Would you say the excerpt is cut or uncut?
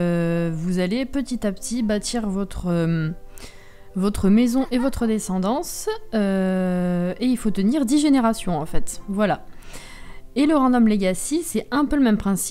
uncut